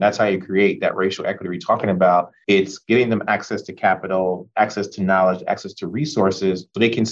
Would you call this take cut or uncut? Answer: uncut